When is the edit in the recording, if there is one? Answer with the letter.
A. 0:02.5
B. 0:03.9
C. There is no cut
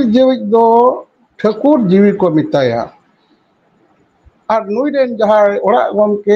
C